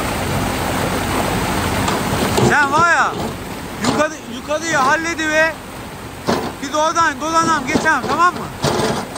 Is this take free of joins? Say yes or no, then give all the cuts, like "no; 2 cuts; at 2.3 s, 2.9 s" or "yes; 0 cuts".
yes; 0 cuts